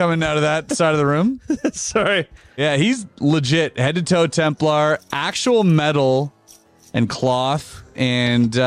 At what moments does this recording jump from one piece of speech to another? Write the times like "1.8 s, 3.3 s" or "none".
2.6 s